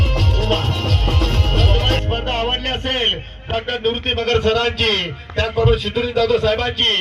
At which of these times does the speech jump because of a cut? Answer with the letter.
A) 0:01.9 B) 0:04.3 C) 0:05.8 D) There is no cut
A